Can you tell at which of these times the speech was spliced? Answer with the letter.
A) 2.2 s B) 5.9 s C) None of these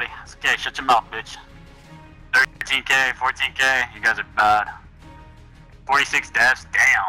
C